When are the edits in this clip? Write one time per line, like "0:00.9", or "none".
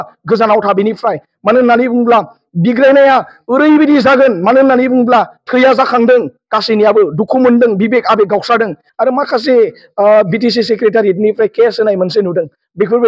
0:08.8